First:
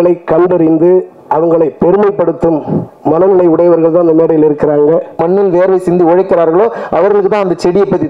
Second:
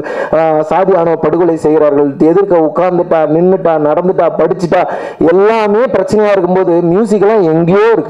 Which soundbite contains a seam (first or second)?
first